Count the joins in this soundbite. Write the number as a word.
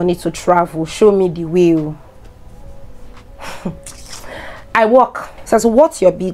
one